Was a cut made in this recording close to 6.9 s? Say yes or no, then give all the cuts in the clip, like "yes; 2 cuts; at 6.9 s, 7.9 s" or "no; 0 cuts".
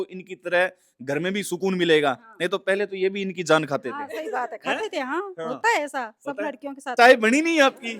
yes; 1 cut; at 6.9 s